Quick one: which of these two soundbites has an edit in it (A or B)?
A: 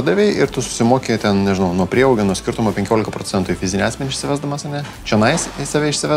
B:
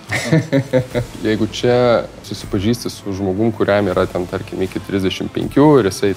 B